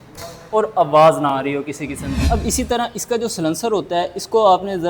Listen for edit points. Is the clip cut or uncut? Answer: cut